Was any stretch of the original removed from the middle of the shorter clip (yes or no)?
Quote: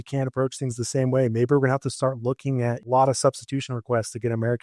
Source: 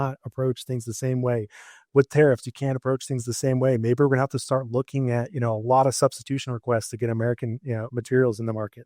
yes